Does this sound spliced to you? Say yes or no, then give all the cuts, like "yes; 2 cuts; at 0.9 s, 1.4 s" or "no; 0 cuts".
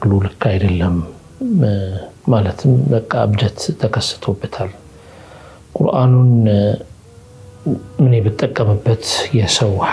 no; 0 cuts